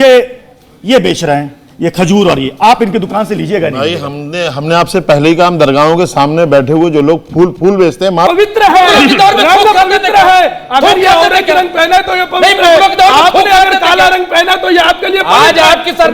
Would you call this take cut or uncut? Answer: cut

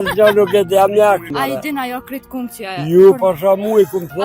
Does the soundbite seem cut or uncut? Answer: cut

